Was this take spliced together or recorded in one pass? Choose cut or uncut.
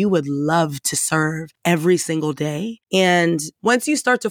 cut